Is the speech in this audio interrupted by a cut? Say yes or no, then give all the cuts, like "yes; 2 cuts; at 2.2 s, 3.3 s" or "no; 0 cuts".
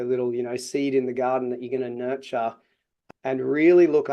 yes; 1 cut; at 2.9 s